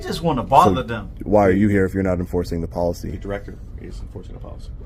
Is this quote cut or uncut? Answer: uncut